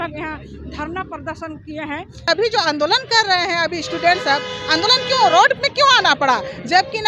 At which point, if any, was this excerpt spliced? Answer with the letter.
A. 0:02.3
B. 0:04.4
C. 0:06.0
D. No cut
A